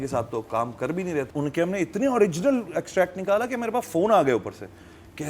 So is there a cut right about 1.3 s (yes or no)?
yes